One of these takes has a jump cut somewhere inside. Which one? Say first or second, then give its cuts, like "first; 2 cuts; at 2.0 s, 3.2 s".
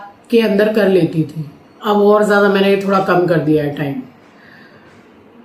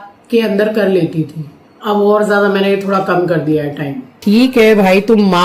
second; 1 cut; at 4.2 s